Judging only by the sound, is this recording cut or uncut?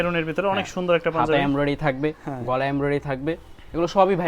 uncut